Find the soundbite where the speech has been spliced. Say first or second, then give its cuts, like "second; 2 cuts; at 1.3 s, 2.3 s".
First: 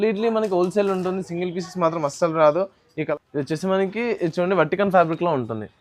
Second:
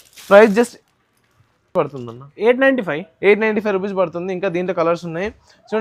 first; 1 cut; at 2.9 s